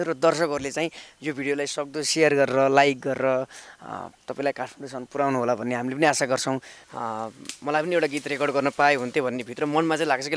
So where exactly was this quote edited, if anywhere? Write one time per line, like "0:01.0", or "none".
0:06.8